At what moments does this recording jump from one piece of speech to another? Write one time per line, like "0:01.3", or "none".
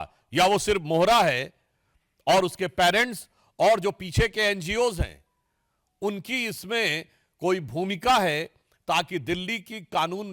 none